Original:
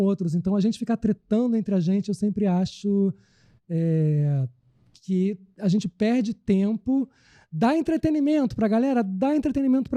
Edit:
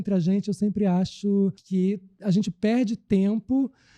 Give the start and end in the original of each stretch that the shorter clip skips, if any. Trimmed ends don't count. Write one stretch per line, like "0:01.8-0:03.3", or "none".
0:03.2-0:05.0